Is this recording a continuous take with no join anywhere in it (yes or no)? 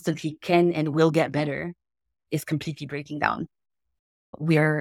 yes